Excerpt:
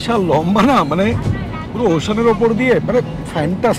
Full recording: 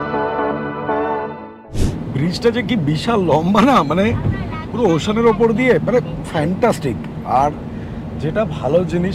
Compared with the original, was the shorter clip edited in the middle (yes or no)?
no